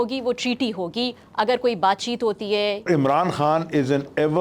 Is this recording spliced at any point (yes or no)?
yes